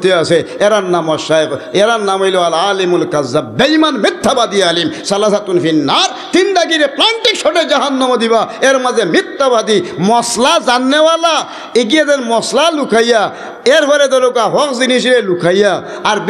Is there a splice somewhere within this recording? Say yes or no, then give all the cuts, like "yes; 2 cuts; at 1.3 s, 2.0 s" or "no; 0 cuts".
no; 0 cuts